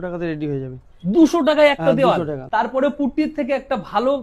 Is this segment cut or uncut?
cut